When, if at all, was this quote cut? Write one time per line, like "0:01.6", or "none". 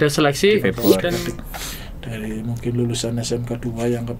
0:01.2

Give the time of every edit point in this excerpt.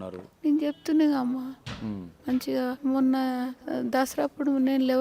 0:02.8
0:03.6

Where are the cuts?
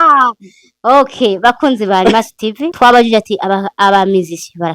0:02.7

